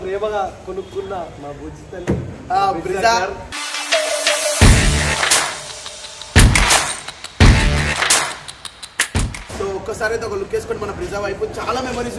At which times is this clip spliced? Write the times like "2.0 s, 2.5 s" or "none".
9.4 s